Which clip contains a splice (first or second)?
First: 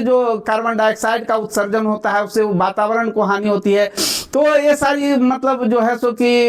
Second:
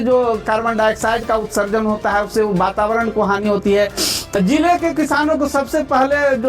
second